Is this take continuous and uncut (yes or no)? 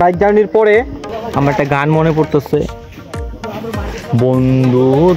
no